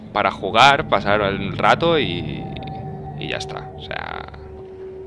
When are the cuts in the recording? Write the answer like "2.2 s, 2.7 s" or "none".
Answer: 2.5 s